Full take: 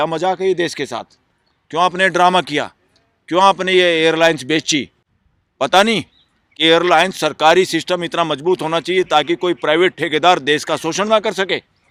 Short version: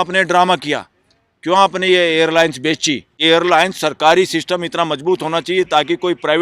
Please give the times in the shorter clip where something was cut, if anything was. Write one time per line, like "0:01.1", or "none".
0:03.1